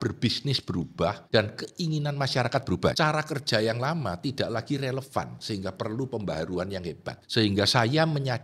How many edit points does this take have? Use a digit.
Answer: 3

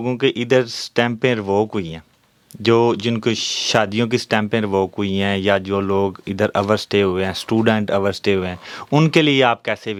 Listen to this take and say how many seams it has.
0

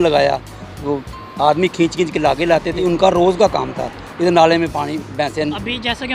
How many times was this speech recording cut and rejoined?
1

